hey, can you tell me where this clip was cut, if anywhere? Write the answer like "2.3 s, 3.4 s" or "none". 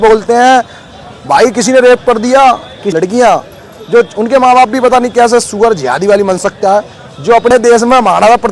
2.8 s, 7.5 s